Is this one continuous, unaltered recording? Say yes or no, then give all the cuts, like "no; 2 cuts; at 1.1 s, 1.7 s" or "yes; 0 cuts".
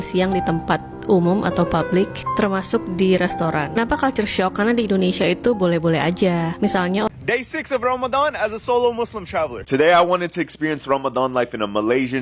no; 1 cut; at 7.1 s